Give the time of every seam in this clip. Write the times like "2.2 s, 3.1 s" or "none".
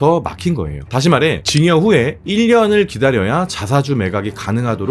none